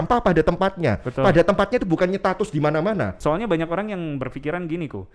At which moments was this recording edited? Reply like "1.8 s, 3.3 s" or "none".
3.1 s